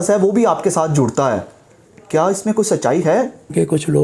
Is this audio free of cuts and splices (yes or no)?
yes